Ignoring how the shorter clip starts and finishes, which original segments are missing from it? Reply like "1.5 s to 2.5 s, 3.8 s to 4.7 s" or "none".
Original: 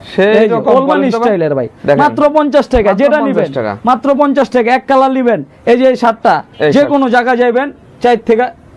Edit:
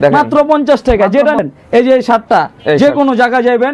3.3 s to 5.3 s